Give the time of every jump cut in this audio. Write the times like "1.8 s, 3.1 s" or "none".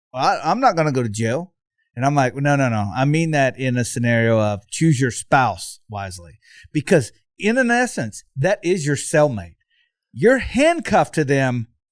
none